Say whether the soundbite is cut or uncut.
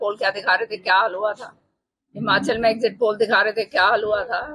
uncut